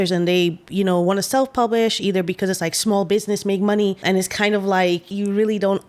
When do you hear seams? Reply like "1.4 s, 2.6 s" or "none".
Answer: 4.0 s, 5.1 s